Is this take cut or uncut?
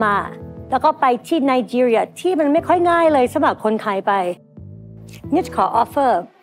uncut